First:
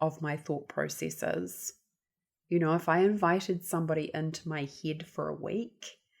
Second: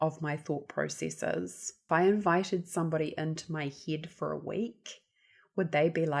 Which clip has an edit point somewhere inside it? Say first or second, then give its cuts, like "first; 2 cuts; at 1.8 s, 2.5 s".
second; 1 cut; at 1.9 s